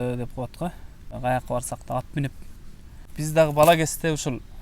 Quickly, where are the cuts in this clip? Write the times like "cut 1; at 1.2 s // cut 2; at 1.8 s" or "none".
cut 1; at 1.1 s // cut 2; at 3.0 s